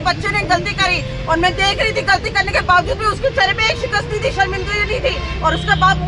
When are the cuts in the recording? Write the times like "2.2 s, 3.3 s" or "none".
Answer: none